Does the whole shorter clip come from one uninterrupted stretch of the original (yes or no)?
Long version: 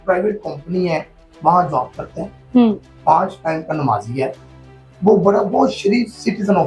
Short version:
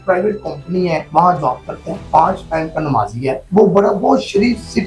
no